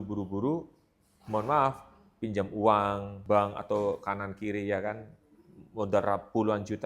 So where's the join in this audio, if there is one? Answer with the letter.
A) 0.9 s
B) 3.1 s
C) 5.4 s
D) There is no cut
B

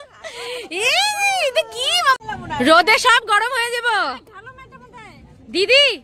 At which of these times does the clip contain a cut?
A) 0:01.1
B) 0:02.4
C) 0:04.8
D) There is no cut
B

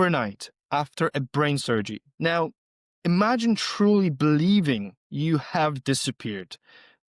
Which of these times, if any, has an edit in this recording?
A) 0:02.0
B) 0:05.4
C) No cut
A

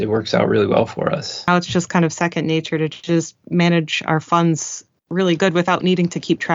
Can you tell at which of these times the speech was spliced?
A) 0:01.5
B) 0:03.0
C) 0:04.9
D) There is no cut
A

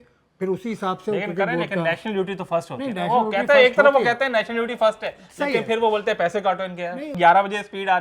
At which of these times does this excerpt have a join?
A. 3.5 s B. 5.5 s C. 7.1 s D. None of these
C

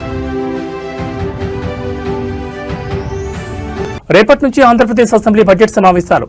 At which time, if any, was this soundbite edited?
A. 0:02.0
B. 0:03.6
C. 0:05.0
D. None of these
B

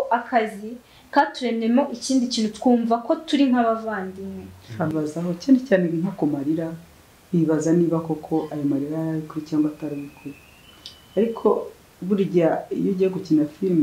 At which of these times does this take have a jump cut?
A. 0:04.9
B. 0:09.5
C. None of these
A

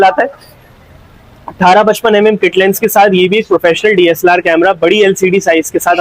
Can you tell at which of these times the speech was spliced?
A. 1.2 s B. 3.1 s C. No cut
C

